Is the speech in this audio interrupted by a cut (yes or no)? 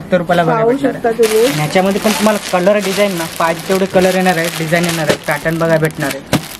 no